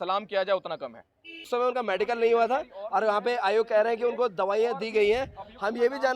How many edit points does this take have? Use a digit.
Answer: 1